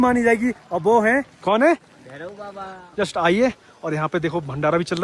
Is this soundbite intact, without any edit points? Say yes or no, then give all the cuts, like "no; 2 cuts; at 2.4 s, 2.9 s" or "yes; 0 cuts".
no; 1 cut; at 2.8 s